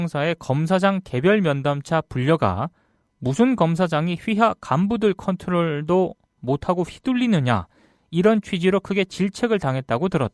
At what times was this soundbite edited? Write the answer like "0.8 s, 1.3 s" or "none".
5.7 s